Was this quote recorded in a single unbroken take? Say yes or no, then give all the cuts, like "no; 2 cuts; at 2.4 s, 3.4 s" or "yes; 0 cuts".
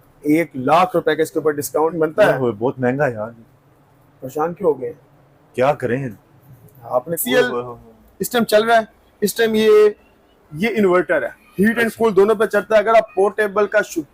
no; 2 cuts; at 1.9 s, 7.2 s